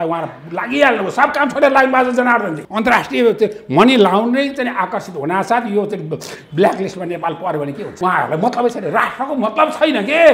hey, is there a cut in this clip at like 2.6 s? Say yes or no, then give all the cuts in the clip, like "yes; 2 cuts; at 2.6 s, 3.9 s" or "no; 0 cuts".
yes; 2 cuts; at 2.6 s, 7.9 s